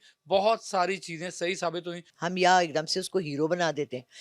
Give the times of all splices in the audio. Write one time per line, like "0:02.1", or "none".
0:02.1